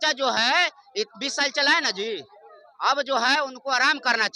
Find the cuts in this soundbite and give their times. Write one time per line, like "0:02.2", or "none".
none

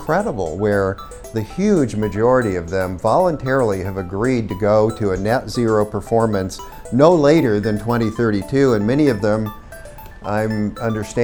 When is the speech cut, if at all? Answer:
none

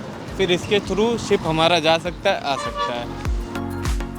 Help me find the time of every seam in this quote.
0:03.2

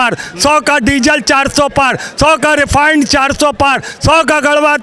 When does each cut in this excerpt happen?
none

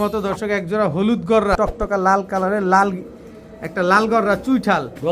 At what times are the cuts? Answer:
0:01.6

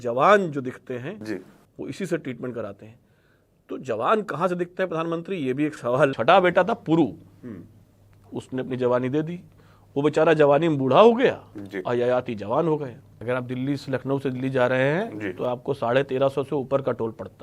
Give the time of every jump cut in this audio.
0:06.1
0:13.1

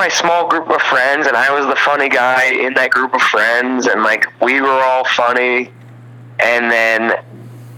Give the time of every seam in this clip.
none

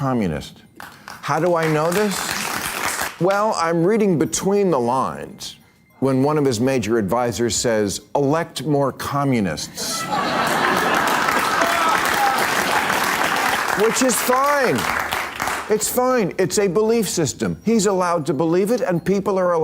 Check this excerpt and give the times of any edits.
0:03.0
0:13.6

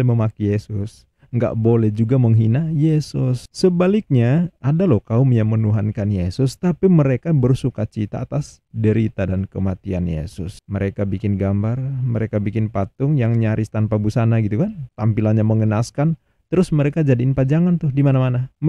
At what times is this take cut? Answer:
0:03.4

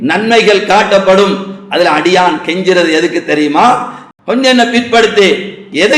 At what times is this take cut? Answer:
0:04.0

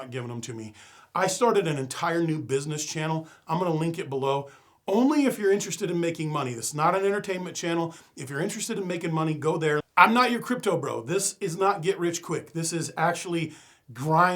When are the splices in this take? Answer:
0:09.9

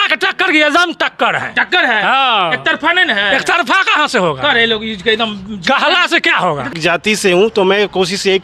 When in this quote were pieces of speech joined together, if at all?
0:06.7

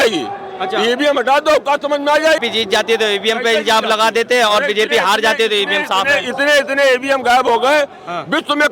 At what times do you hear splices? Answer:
0:02.5

